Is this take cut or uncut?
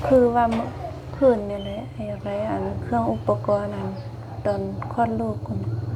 uncut